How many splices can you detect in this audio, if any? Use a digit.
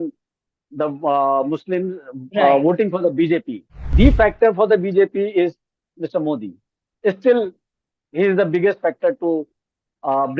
1